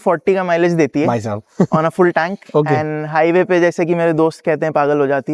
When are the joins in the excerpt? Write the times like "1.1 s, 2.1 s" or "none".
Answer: none